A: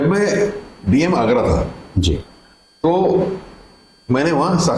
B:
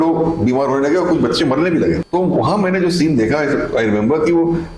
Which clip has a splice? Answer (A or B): B